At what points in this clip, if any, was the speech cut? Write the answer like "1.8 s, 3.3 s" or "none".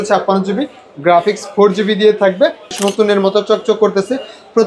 2.8 s